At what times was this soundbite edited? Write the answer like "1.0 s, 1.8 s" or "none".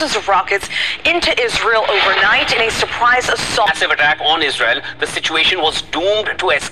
3.7 s